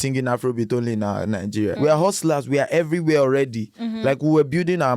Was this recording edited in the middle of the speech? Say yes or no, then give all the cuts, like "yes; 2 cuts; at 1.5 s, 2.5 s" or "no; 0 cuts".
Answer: yes; 1 cut; at 1.8 s